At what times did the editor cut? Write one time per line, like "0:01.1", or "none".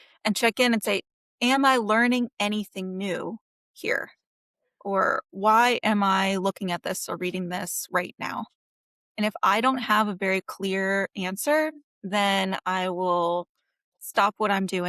0:14.0